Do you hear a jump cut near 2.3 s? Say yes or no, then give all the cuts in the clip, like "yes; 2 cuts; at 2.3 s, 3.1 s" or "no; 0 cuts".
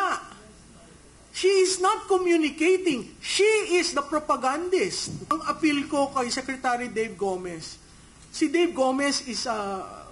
no; 1 cut; at 5.3 s